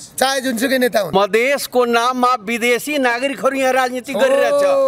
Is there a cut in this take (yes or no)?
yes